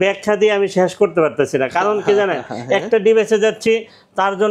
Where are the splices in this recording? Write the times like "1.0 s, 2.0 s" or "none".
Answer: none